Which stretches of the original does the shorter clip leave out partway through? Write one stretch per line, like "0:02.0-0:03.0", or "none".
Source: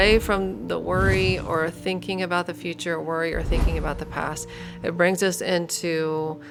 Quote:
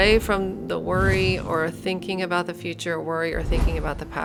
none

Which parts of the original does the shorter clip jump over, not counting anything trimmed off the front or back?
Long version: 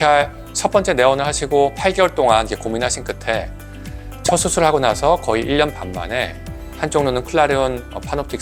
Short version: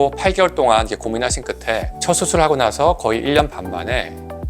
0:03.7-0:04.3

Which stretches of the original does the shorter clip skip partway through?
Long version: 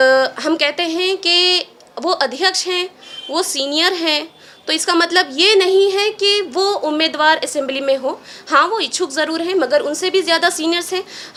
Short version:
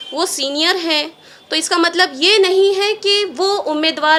none

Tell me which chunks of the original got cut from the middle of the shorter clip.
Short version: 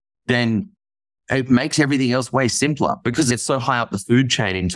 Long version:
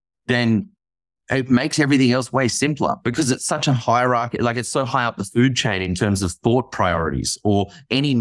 0:03.3-0:04.5

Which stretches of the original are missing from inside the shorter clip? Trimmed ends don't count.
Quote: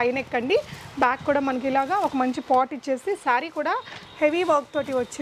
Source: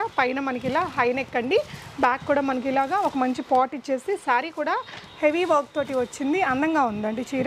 none

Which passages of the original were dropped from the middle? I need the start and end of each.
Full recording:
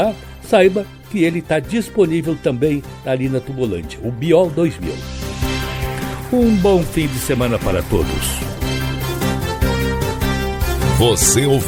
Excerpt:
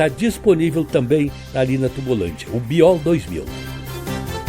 0:05.1-0:08.7

